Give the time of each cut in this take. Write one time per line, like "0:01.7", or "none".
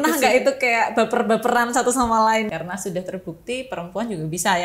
0:02.5